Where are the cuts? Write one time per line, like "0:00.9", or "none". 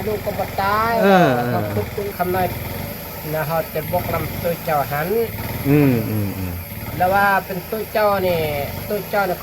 0:02.1

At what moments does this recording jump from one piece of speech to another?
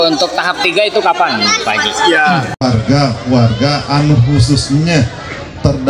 0:02.5

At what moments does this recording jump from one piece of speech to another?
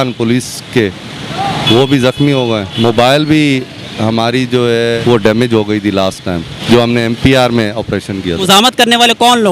0:02.7
0:05.0
0:06.5
0:08.4

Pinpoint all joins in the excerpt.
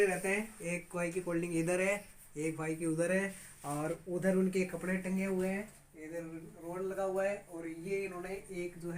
none

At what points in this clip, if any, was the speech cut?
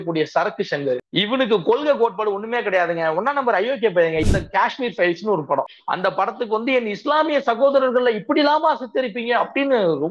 0:01.1
0:04.2
0:05.8

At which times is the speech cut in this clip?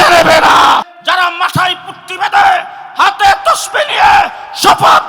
0:00.9

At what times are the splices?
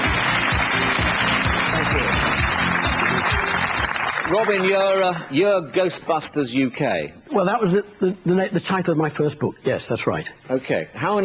0:09.9

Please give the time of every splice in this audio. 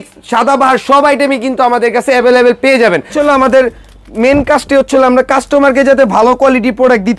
0:03.1

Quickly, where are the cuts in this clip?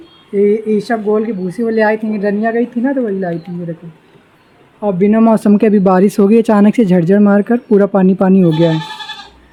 none

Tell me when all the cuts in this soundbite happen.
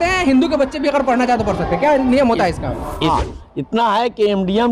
0:03.1

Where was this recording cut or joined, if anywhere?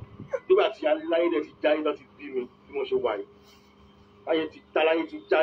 none

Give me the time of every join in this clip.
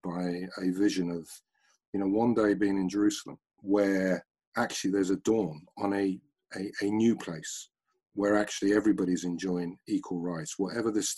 0:03.5
0:05.7

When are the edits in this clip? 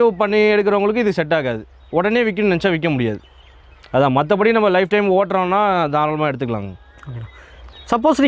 none

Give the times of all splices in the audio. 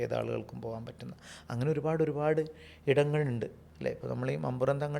0:03.6

